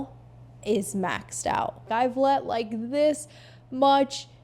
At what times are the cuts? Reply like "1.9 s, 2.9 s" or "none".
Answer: 1.9 s